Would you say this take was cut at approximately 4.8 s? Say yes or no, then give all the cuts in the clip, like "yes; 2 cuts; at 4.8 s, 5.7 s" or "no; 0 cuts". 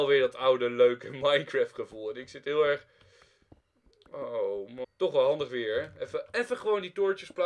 yes; 1 cut; at 4.8 s